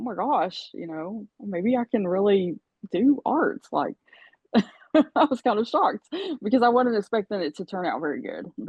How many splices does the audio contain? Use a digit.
0